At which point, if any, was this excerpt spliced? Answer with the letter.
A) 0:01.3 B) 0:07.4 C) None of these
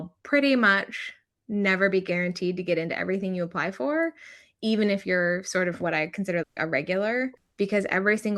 B